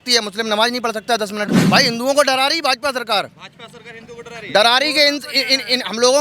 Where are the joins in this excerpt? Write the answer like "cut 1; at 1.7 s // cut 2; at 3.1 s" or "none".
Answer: cut 1; at 1.6 s